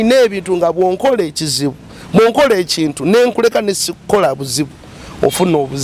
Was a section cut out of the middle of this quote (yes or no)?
no